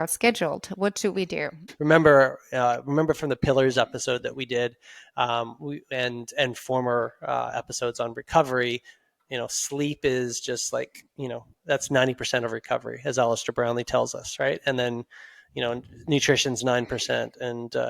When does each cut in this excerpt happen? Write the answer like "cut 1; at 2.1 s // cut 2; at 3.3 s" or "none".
cut 1; at 1.6 s